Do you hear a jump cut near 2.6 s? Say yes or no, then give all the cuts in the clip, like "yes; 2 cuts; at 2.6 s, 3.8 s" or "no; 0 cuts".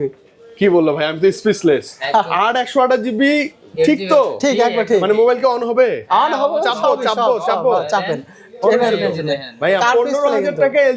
no; 0 cuts